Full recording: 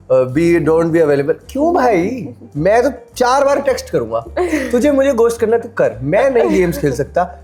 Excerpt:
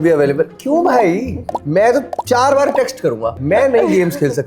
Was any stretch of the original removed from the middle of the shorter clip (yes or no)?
yes